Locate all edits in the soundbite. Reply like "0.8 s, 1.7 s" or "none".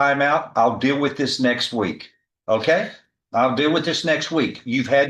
none